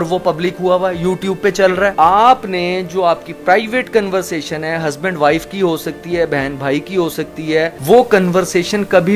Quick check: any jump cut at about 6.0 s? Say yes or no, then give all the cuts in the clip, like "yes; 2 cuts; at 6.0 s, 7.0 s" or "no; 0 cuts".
no; 2 cuts; at 1.9 s, 7.8 s